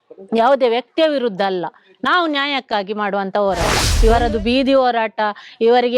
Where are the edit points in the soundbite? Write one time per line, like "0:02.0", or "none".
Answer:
0:03.8